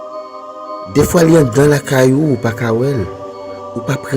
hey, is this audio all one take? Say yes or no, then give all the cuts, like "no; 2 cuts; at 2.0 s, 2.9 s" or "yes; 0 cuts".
no; 1 cut; at 0.9 s